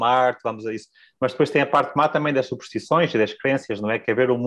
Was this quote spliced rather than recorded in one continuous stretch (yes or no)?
no